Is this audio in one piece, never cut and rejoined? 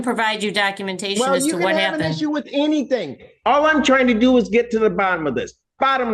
yes; 0 cuts

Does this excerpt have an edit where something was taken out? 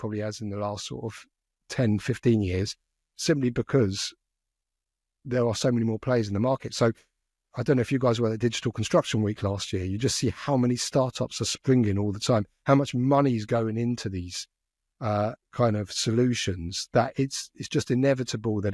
no; 0 cuts

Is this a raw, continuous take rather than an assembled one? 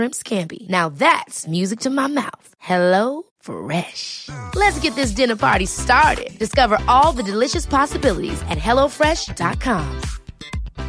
yes; 0 cuts

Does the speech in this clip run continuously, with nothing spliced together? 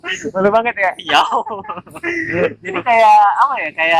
yes; 0 cuts

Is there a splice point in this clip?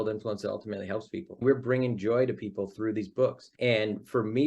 yes; 2 cuts; at 1.4 s, 3.5 s

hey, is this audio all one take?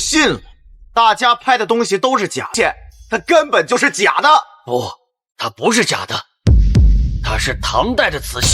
no; 1 cut; at 2.5 s

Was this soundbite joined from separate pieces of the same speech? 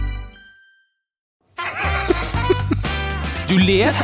yes; 1 cut; at 1.3 s

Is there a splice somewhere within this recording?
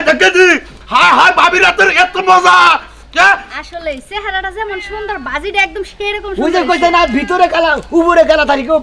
no; 0 cuts

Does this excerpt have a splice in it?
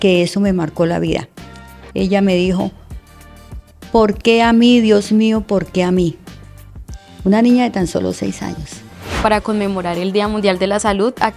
yes; 1 cut; at 9.2 s

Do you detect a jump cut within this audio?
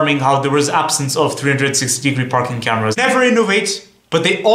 yes; 1 cut; at 3.0 s

